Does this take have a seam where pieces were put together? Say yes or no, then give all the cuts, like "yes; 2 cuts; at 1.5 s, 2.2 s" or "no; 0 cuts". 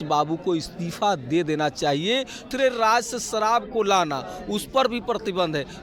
yes; 1 cut; at 2.4 s